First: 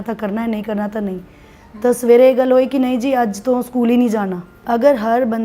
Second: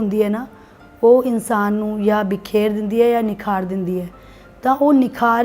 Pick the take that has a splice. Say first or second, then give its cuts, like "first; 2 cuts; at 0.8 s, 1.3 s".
first; 1 cut; at 4.5 s